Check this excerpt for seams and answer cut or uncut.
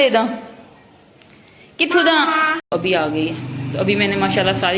cut